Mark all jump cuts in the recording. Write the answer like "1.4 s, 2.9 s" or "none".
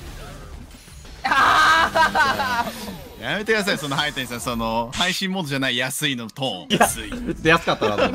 1.1 s, 6.7 s